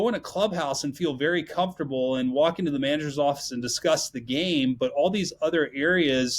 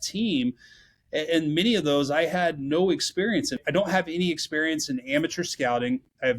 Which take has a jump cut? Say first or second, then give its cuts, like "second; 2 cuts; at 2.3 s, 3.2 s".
second; 1 cut; at 3.6 s